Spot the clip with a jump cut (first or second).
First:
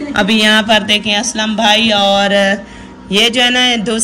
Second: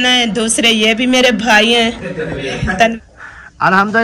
second